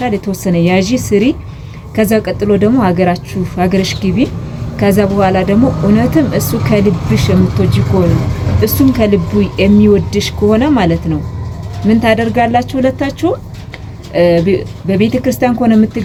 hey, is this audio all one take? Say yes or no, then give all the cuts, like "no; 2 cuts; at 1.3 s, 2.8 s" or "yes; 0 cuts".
yes; 0 cuts